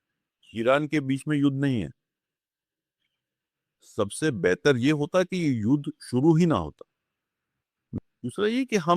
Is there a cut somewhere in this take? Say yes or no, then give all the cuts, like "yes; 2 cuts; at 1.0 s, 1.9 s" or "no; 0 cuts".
yes; 1 cut; at 8.0 s